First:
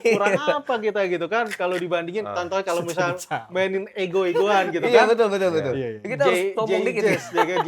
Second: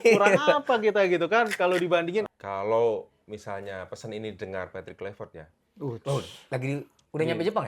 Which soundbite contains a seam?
second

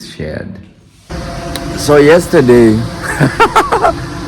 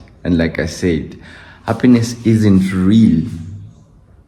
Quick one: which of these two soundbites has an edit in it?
first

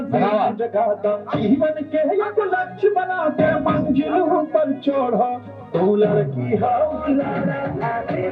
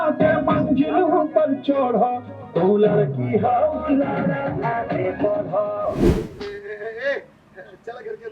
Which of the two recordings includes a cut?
second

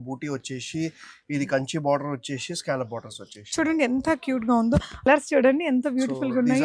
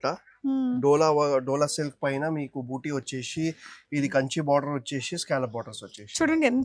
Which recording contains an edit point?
first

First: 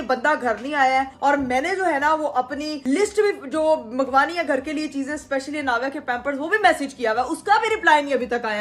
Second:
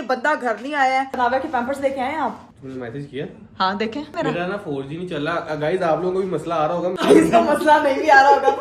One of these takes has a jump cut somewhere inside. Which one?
second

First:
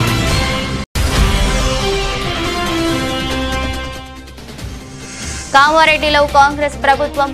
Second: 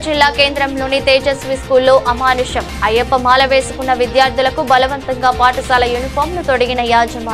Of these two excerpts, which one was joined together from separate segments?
first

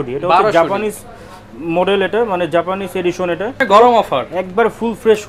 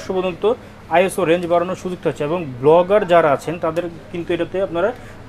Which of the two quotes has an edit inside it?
first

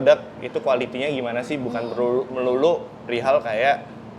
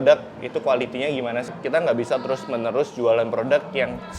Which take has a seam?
second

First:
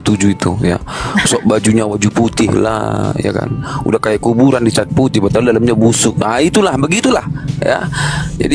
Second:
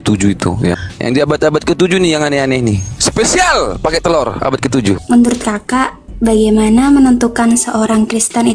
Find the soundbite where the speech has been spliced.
second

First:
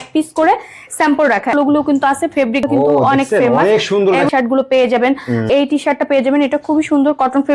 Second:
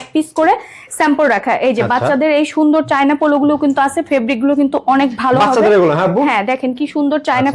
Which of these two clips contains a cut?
first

